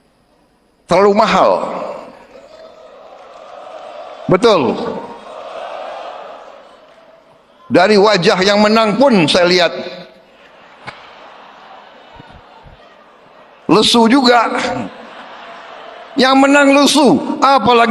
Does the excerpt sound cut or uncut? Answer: uncut